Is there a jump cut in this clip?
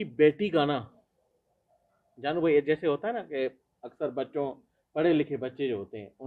no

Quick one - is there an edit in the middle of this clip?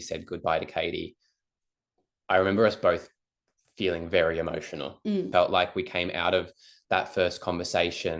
yes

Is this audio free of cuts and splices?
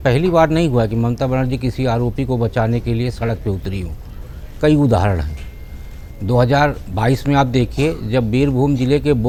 yes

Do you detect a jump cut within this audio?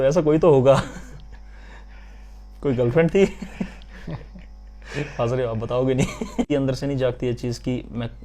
yes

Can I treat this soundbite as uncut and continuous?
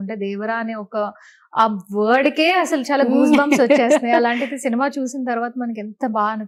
yes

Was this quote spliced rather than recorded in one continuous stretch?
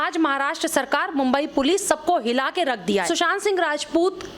yes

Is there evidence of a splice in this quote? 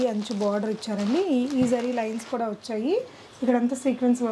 no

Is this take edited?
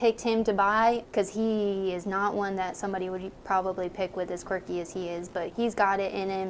yes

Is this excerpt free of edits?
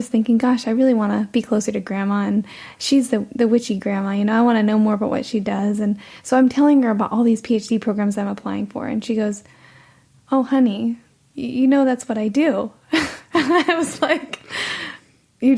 yes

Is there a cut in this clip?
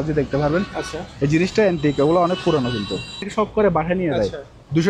yes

